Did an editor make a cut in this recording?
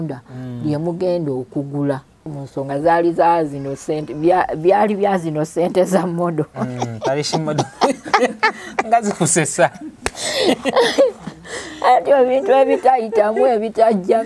yes; 1 cut; at 2.4 s

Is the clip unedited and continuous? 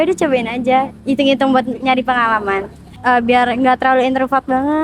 no; 1 cut; at 2.9 s

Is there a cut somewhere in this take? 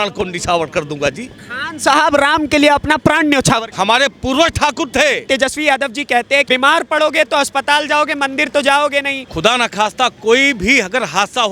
yes; 4 cuts; at 3.7 s, 5.2 s, 6.5 s, 9.2 s

